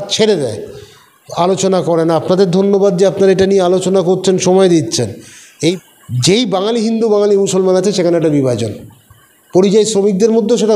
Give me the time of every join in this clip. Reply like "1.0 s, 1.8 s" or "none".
5.8 s